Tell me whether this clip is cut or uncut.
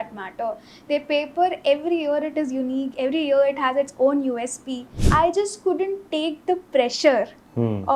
cut